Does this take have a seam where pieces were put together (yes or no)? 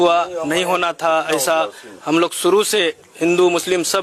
no